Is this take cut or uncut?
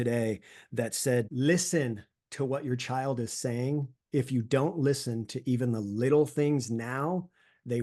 cut